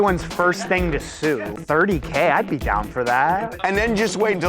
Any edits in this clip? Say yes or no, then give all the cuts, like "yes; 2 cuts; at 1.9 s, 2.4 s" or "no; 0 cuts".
yes; 2 cuts; at 1.5 s, 3.5 s